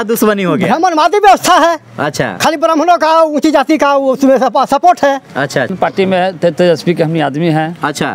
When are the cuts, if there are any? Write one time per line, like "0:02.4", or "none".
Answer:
0:05.7